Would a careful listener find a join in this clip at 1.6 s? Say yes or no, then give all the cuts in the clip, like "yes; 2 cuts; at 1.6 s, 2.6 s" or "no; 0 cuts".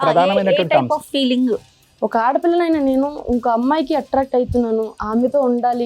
yes; 1 cut; at 1.6 s